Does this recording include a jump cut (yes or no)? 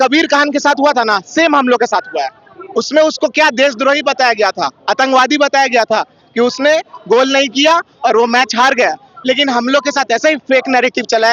no